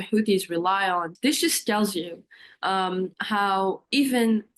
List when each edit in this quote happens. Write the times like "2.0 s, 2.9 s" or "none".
1.1 s